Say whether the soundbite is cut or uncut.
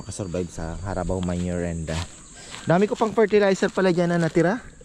uncut